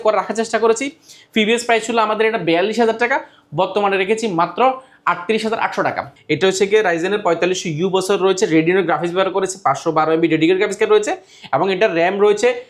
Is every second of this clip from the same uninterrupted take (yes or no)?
no